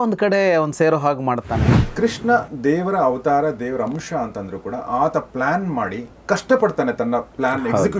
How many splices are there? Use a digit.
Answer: 1